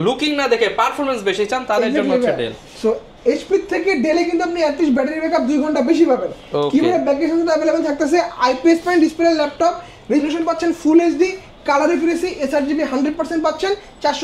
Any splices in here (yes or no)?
no